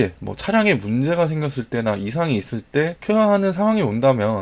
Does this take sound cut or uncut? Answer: uncut